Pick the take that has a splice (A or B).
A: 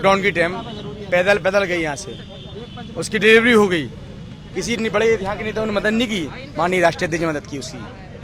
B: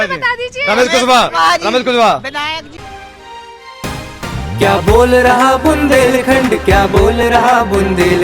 B